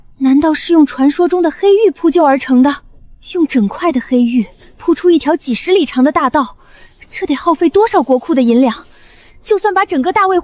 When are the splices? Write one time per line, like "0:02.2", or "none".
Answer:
none